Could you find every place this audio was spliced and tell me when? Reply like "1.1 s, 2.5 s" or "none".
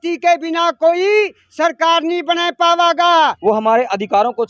3.4 s